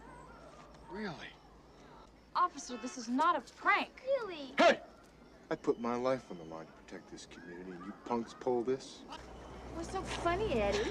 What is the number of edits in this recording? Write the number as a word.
two